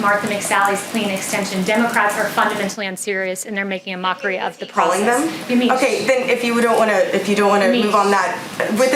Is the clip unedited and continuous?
yes; 0 cuts

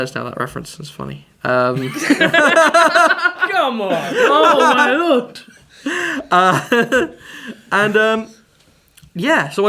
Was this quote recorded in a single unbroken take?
no; 1 cut; at 4.0 s

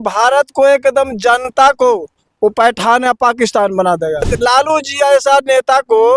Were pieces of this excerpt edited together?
yes; 1 cut; at 4.3 s

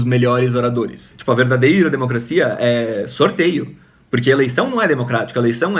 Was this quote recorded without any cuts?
no; 1 cut; at 1.1 s

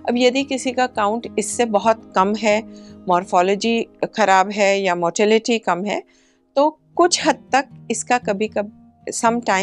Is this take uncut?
yes; 0 cuts

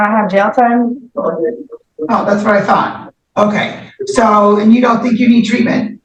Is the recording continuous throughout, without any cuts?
yes; 0 cuts

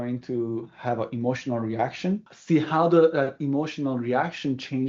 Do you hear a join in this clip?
yes; 1 cut; at 2.3 s

